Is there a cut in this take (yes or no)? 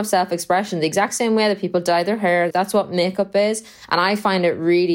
yes